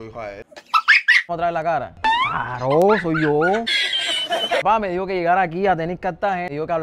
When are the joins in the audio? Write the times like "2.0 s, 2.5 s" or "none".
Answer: 1.3 s, 4.6 s